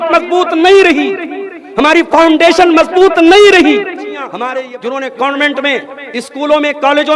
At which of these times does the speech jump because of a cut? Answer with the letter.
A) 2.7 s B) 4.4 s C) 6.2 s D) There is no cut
B